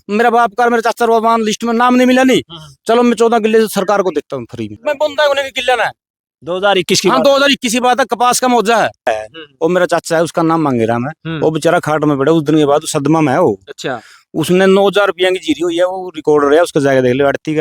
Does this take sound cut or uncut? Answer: cut